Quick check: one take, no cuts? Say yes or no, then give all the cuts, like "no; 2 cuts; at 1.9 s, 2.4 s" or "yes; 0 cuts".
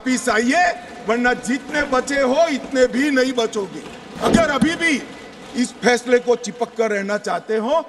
no; 1 cut; at 4.2 s